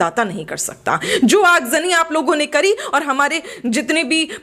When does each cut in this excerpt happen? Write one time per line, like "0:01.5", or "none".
none